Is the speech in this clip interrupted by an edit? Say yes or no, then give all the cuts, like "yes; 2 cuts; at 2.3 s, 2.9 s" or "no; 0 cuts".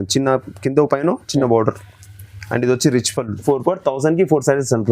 yes; 1 cut; at 3.4 s